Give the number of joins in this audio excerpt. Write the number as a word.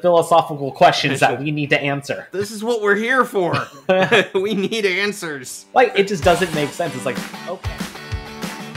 one